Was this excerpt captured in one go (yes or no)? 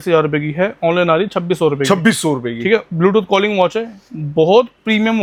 yes